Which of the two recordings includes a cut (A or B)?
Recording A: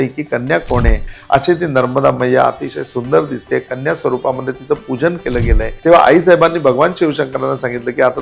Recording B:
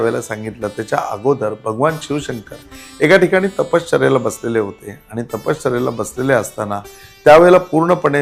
A